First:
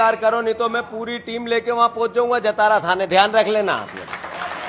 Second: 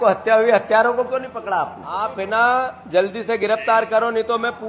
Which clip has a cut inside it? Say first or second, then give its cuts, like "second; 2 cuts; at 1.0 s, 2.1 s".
second; 1 cut; at 2.1 s